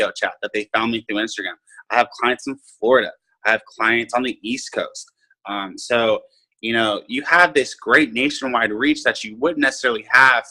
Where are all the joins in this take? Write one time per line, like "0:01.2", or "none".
none